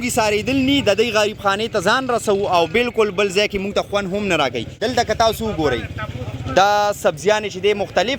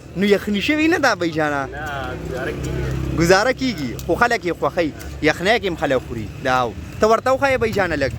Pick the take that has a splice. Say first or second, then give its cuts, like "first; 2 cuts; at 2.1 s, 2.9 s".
first; 1 cut; at 5.0 s